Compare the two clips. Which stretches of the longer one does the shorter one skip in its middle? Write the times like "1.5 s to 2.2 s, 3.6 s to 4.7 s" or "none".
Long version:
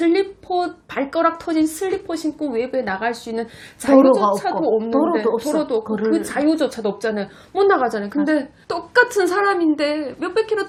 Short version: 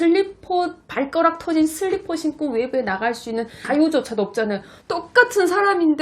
3.6 s to 6.3 s, 7.4 s to 8.5 s